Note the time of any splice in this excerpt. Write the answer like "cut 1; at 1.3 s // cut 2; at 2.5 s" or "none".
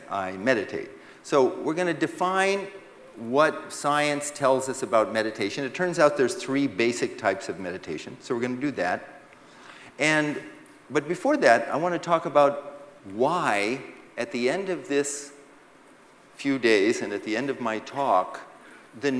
cut 1; at 17.4 s